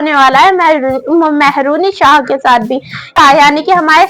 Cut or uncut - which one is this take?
cut